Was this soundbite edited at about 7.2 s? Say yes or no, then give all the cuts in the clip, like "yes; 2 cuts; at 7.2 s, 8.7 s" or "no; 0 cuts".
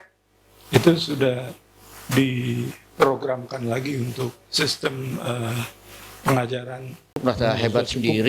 yes; 1 cut; at 7.2 s